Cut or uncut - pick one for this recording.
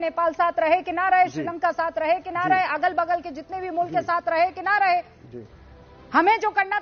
uncut